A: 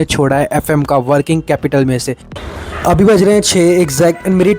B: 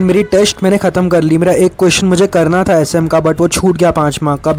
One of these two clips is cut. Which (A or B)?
A